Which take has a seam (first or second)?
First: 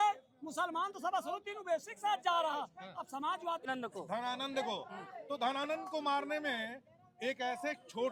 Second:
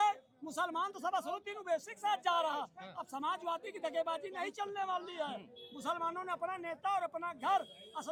first